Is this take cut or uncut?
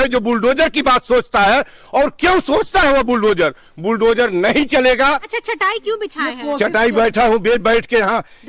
cut